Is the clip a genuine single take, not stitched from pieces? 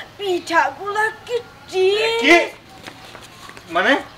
yes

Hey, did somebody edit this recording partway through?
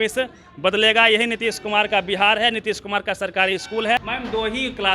yes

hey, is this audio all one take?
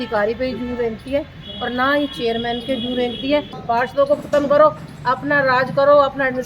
no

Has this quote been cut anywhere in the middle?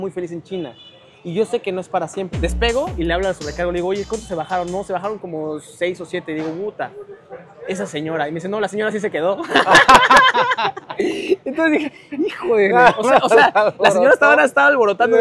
yes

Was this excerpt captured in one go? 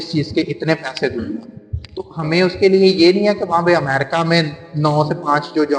yes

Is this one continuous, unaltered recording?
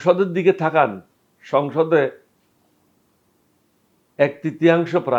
yes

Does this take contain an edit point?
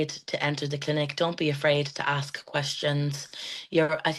no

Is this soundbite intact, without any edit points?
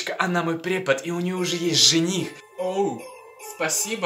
no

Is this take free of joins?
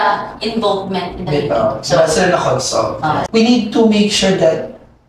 no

